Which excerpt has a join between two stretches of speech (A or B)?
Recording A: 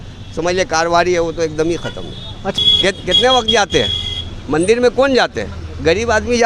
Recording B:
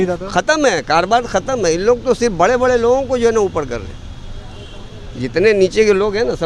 A